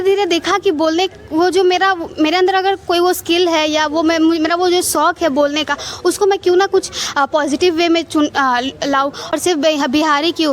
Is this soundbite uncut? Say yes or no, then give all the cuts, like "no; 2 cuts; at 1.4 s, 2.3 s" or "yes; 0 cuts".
no; 1 cut; at 9.3 s